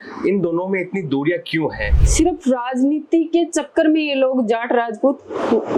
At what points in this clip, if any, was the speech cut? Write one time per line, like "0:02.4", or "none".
0:02.0

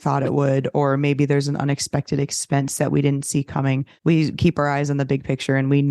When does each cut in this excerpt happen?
0:03.9

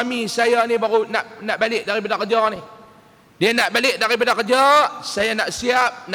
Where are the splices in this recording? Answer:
none

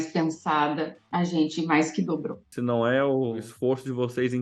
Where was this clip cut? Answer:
0:02.5
0:03.5

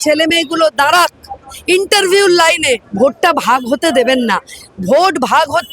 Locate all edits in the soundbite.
0:02.9

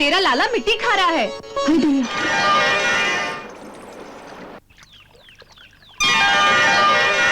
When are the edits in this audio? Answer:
0:03.2

